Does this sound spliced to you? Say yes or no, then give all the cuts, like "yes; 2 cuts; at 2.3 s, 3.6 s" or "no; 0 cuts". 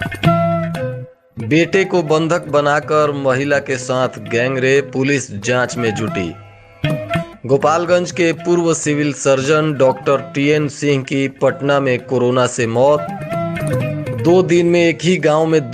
yes; 1 cut; at 1.0 s